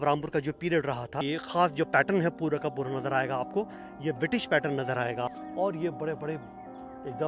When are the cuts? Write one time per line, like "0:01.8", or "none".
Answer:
0:01.2
0:05.4